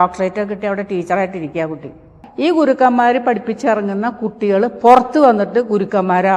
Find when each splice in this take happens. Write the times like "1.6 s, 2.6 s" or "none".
2.2 s